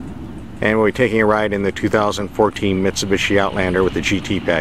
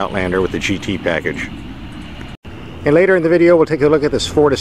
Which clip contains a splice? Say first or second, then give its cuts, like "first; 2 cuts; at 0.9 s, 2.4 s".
second; 1 cut; at 2.4 s